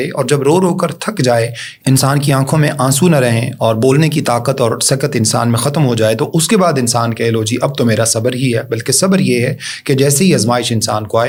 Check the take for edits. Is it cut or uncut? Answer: uncut